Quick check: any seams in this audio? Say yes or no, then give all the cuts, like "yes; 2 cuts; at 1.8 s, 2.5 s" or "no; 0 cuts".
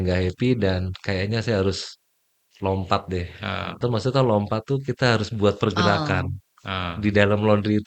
yes; 1 cut; at 3.8 s